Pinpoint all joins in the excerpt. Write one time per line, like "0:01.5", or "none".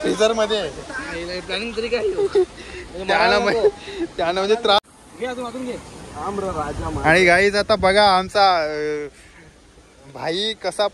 0:04.9